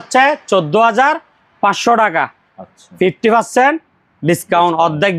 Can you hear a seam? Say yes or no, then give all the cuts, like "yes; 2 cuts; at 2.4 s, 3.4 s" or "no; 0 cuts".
no; 0 cuts